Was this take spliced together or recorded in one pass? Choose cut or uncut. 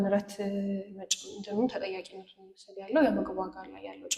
uncut